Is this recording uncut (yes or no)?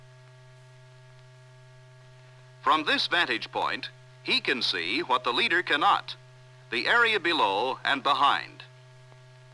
yes